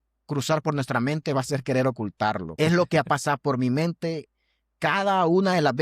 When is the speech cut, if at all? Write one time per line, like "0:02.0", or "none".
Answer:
0:02.5